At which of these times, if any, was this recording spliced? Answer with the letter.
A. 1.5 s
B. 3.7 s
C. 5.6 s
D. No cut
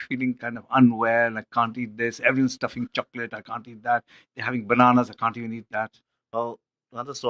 B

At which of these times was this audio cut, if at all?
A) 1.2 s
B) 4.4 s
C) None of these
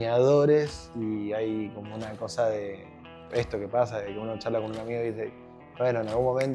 C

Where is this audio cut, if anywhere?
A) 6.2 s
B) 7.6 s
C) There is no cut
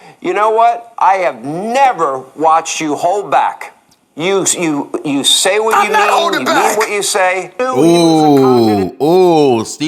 B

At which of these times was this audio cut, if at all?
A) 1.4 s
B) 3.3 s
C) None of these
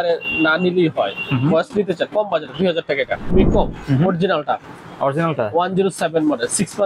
B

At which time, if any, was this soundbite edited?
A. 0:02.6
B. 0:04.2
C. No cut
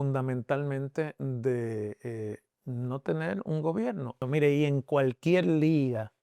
B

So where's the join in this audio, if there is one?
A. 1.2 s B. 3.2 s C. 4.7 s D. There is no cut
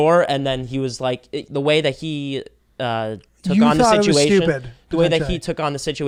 D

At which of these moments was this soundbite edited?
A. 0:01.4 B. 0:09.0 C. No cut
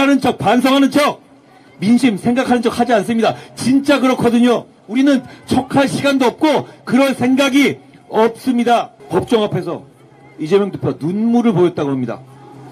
B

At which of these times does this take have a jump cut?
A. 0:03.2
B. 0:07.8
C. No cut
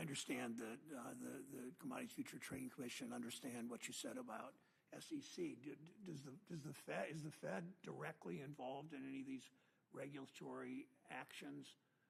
C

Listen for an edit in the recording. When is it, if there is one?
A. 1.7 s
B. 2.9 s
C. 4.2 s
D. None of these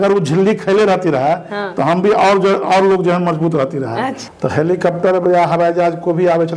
C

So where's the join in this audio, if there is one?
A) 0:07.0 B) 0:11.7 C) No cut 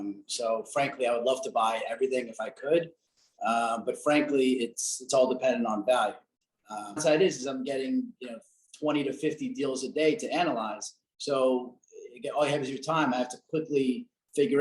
A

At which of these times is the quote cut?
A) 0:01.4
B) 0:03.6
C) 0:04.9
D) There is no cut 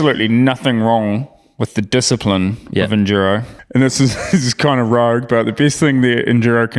B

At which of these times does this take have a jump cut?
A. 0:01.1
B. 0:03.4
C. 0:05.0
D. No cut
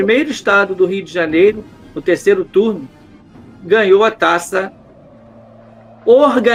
D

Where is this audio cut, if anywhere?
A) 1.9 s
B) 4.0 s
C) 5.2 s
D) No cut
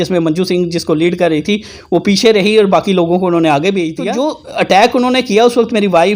B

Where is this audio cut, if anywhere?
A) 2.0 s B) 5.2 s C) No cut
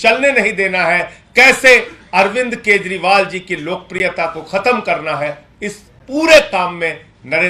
C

